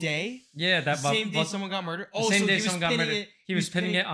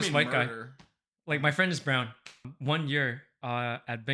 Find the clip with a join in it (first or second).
second